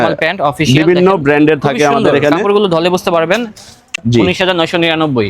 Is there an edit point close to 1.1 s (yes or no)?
no